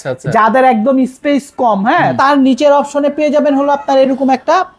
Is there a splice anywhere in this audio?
yes; 1 cut; at 2.1 s

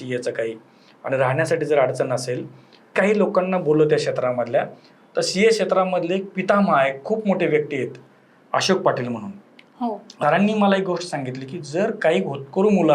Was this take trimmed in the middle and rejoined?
yes; 2 cuts; at 2.9 s, 10.0 s

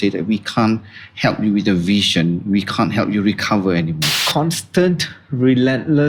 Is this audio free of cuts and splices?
yes; 0 cuts

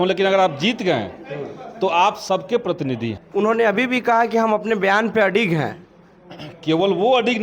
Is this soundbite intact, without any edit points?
no; 1 cut; at 3.2 s

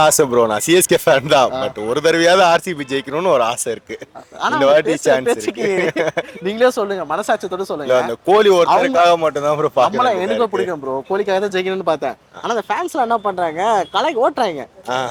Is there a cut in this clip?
no; 0 cuts

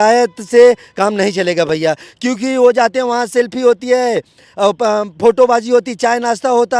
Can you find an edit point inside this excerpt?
no; 0 cuts

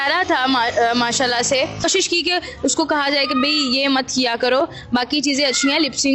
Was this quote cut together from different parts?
yes; 1 cut; at 1.9 s

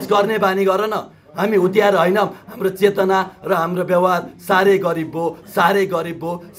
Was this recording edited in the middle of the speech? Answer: yes; 1 cut; at 2.4 s

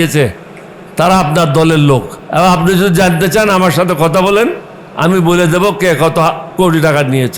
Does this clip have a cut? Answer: yes; 1 cut; at 2.2 s

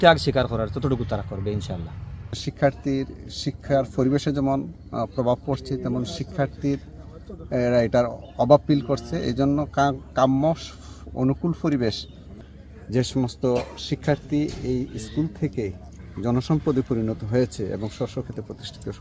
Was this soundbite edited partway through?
yes; 2 cuts; at 2.4 s, 12.2 s

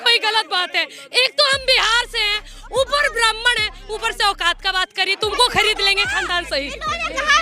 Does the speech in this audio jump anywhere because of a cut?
yes; 1 cut; at 1.0 s

